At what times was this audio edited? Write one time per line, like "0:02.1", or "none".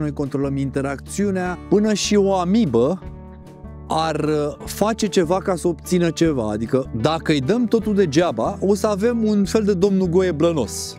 0:01.6
0:06.9